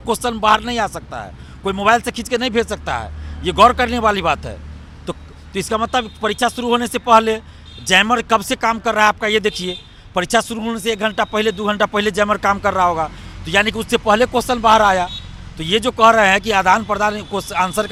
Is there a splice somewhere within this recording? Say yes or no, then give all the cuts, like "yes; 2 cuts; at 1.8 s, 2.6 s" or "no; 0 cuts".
no; 0 cuts